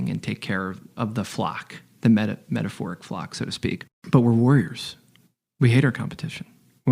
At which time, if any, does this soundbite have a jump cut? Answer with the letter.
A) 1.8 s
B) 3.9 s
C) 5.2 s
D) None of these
B